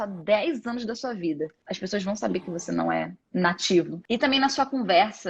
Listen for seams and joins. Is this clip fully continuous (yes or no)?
no